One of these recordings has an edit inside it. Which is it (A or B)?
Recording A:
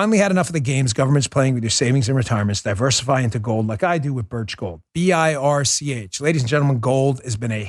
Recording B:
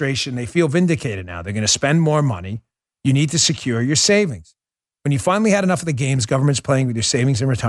A